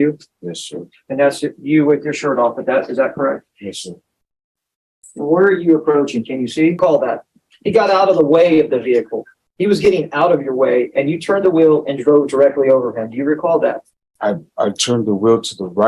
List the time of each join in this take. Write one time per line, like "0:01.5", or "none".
0:06.8